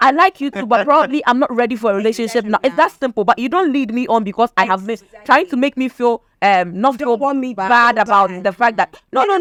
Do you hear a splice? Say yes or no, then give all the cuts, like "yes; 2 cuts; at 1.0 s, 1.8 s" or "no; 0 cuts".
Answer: no; 0 cuts